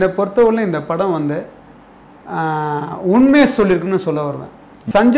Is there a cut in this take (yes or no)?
no